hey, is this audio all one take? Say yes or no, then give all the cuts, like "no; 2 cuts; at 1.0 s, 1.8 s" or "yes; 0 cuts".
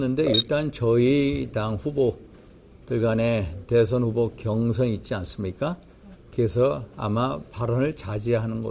yes; 0 cuts